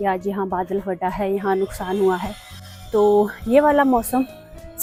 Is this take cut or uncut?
uncut